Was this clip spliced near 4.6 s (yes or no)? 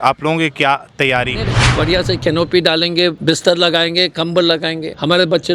no